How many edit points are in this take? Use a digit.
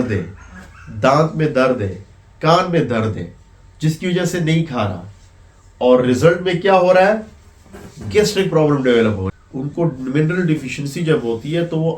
1